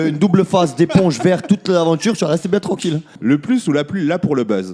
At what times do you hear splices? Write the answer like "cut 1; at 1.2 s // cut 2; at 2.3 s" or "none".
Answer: cut 1; at 3.1 s